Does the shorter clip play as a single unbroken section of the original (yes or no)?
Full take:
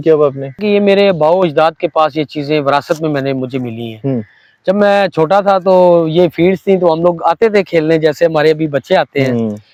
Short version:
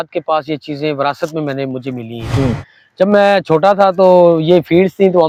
yes